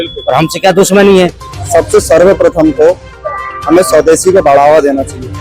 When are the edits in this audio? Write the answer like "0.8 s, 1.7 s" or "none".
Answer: 1.5 s